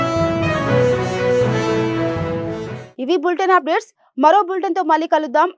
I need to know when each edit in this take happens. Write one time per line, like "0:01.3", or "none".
none